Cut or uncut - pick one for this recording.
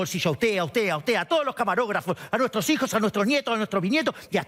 uncut